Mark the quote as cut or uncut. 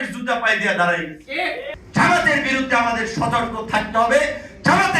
cut